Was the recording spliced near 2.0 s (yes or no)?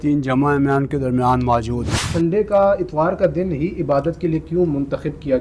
yes